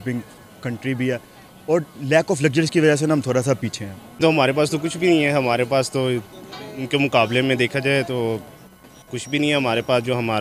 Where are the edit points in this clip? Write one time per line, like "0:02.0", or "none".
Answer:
0:04.2